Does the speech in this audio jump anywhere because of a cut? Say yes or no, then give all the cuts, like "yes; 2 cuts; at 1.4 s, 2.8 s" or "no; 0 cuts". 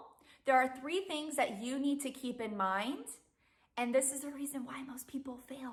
no; 0 cuts